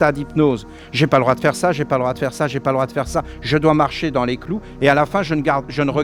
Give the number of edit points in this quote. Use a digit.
0